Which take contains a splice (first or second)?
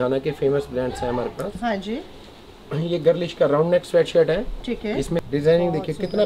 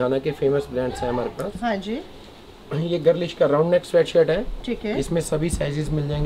first